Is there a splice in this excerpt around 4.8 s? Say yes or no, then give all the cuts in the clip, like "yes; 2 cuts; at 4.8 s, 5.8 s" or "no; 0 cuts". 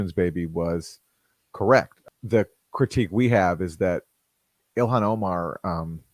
no; 1 cut; at 2.0 s